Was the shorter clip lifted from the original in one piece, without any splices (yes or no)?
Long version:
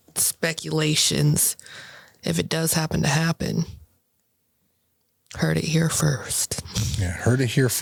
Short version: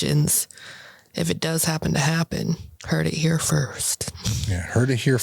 no